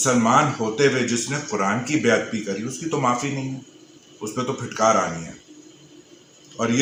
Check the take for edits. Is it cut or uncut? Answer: uncut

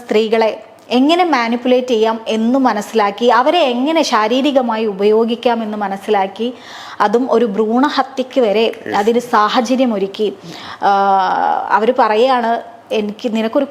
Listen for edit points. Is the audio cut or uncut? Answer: uncut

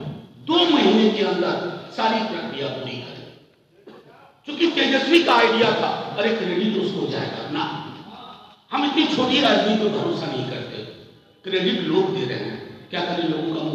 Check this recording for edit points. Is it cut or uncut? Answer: uncut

